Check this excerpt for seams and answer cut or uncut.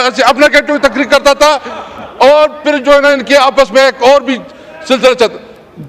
uncut